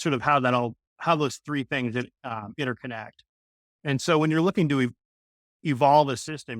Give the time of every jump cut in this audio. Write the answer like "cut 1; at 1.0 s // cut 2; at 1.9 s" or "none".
cut 1; at 5.0 s